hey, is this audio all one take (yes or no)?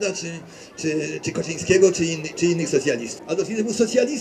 no